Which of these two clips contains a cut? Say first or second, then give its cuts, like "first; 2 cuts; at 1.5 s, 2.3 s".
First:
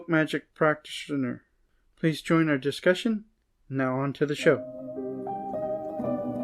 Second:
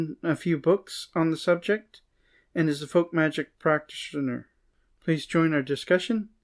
first; 1 cut; at 4.7 s